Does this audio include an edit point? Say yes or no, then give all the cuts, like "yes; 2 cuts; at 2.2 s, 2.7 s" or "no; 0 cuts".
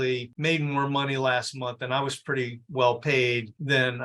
no; 0 cuts